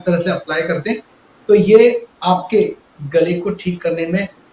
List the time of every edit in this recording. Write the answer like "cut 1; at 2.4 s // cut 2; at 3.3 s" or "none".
cut 1; at 2.1 s